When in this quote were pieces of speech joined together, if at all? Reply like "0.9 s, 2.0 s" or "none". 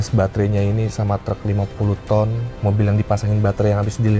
2.5 s